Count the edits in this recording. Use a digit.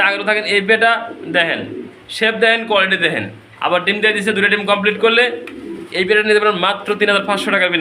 0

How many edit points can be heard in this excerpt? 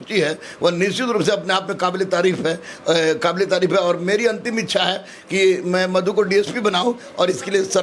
0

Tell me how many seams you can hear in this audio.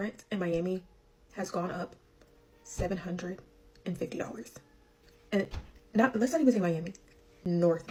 0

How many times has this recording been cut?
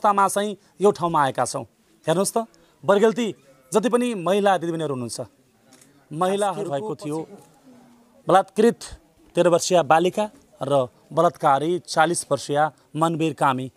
1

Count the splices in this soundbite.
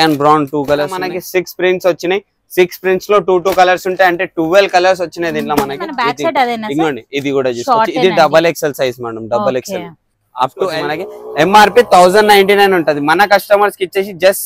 3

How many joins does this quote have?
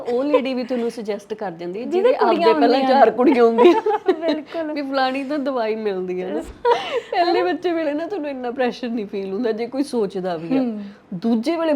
1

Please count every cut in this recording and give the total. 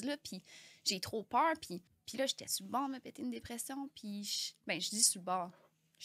1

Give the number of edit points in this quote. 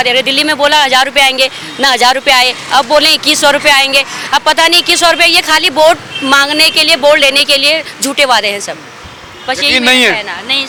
0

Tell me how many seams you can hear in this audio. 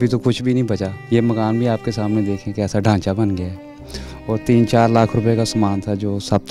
1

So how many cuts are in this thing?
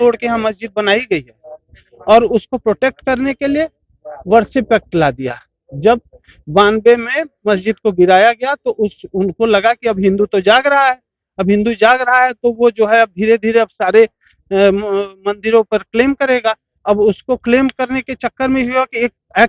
0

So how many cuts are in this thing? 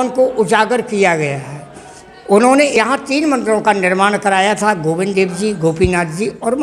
1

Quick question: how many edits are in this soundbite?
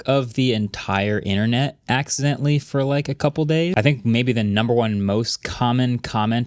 1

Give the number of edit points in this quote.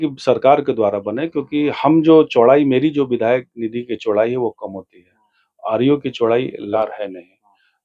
1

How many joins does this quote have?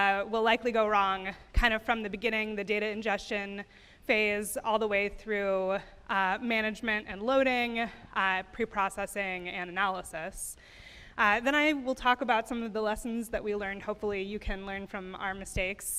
0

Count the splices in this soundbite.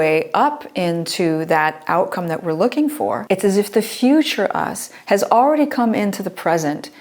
1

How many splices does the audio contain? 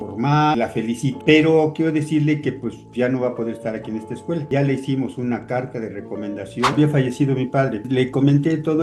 1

